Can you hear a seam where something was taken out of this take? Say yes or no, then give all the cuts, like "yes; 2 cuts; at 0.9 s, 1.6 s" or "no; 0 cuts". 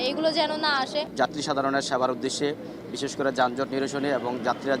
yes; 1 cut; at 1.1 s